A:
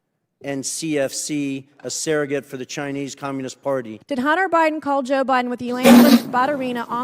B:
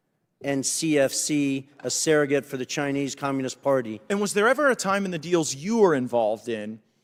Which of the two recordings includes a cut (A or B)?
A